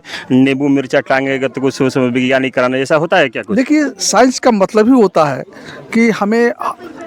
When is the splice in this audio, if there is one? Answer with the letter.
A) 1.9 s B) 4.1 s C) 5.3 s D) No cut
D